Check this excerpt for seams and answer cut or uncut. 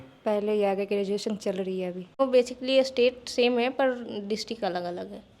cut